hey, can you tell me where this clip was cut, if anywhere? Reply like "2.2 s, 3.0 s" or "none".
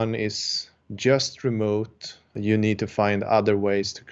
2.3 s